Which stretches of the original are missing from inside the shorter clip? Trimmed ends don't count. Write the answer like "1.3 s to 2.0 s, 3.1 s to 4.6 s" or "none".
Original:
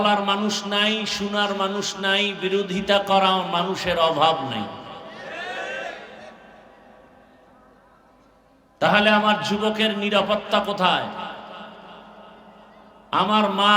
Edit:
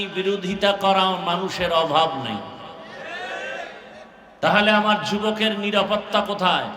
6.5 s to 8.6 s